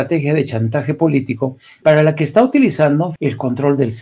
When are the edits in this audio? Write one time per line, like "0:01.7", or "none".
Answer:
0:01.7
0:03.1